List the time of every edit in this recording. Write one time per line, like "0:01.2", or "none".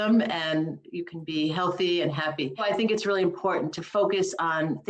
0:02.6